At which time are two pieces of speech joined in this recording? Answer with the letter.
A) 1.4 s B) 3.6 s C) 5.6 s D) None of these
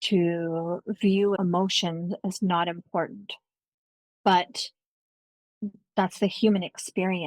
A